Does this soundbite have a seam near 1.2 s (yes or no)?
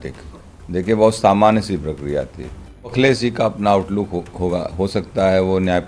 no